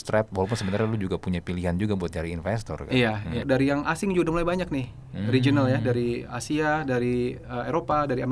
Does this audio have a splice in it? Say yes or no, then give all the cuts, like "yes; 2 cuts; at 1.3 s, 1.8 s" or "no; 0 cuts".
yes; 1 cut; at 3.4 s